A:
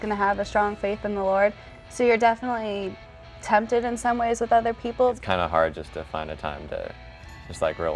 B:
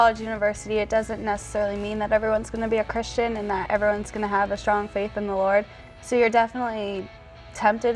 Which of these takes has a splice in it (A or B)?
A